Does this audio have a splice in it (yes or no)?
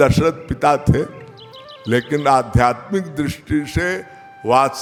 no